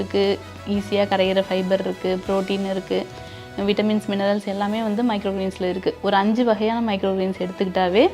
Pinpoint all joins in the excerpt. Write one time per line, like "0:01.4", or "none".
none